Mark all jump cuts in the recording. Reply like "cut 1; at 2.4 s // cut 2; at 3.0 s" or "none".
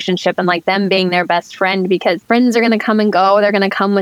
cut 1; at 2.2 s

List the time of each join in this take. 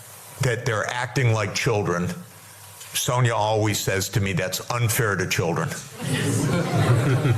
none

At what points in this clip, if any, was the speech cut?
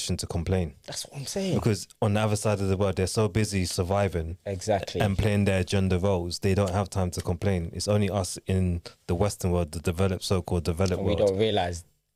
none

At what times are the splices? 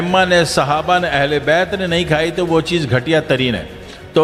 none

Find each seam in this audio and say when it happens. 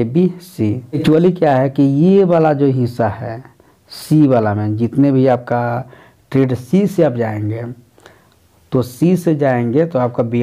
cut 1; at 1.0 s

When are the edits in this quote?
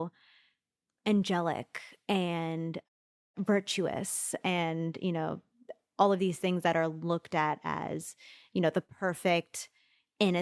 none

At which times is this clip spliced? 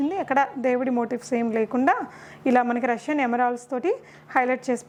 none

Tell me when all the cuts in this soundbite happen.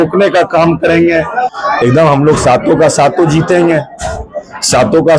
cut 1; at 1.5 s

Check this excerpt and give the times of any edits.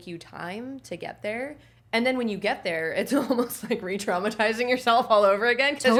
none

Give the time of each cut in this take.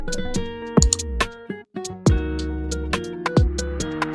none

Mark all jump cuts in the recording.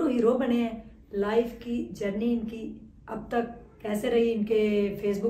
none

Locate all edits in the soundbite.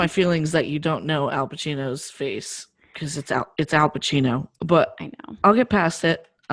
none

